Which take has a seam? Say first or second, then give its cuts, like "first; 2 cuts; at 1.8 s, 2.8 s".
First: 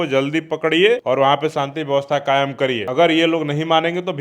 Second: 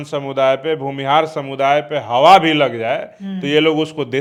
first; 2 cuts; at 1.0 s, 2.9 s